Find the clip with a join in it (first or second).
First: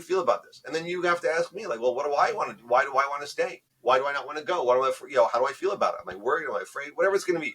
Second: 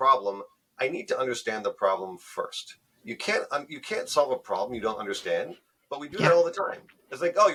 first